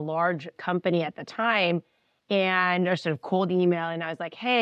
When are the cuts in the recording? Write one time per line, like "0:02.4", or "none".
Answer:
none